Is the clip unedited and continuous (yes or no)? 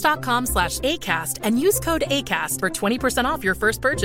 yes